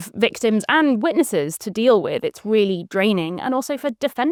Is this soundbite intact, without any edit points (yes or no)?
yes